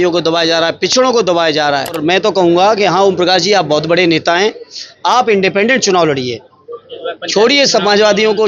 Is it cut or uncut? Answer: cut